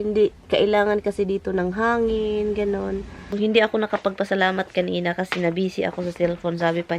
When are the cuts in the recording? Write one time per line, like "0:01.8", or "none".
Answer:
0:03.3

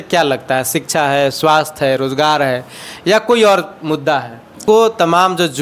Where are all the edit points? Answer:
0:04.6

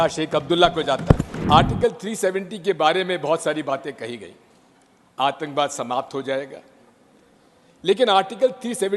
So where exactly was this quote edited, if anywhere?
0:01.4

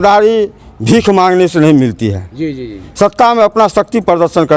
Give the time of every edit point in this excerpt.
none

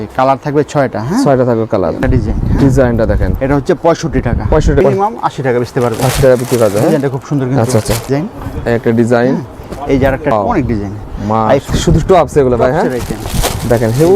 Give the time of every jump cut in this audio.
0:02.0
0:04.8
0:08.1
0:10.3
0:11.7

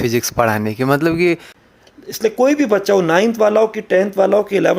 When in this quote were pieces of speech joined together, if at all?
0:01.6

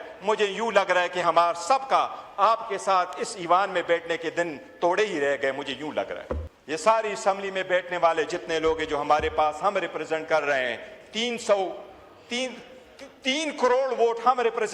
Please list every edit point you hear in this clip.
0:06.4

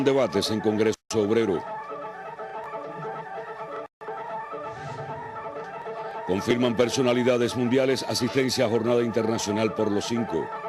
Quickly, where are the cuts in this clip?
0:07.8

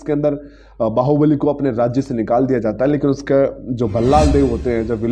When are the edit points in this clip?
none

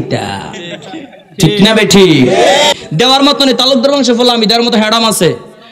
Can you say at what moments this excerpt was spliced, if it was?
0:02.7

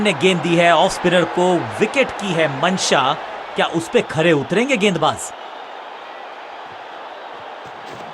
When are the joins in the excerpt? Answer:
0:01.1
0:05.2

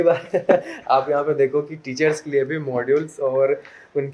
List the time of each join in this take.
none

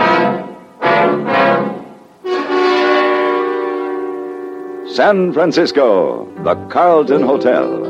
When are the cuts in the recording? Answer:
0:06.3

